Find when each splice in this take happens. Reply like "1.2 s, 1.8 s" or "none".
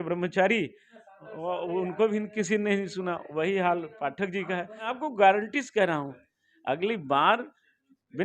4.9 s